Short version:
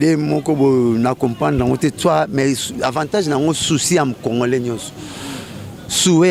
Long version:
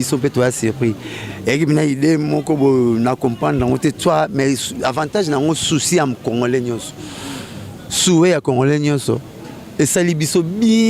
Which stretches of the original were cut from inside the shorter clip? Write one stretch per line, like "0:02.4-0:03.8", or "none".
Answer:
none